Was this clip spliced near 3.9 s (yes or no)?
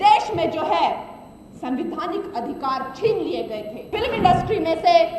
yes